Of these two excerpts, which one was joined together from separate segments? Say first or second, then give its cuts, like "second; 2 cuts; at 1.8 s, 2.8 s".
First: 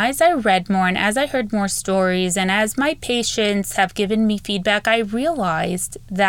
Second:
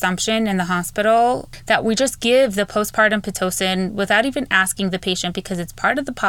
second; 1 cut; at 1.5 s